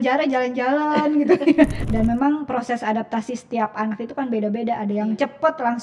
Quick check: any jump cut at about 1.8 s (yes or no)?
yes